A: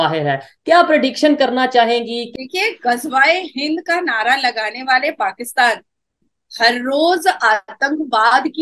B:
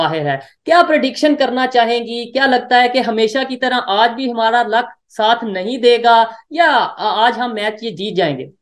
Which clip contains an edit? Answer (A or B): A